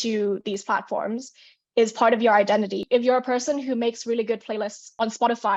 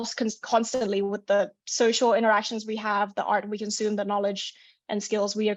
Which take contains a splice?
first; 1 cut; at 2.8 s

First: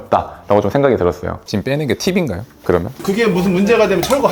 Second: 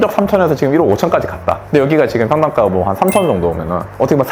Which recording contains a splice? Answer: first; 2 cuts; at 1.3 s, 3.0 s

